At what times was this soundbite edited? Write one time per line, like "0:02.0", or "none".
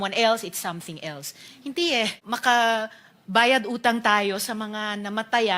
0:02.2